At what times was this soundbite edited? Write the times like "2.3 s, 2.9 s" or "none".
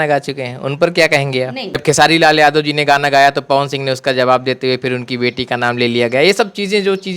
1.8 s